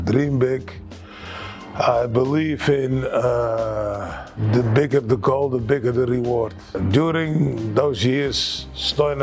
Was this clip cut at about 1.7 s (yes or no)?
no